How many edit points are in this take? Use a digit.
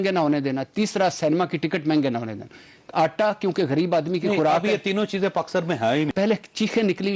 1